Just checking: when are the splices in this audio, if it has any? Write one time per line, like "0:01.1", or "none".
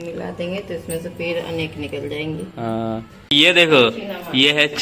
0:03.3